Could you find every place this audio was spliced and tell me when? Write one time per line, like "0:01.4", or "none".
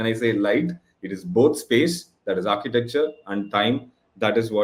none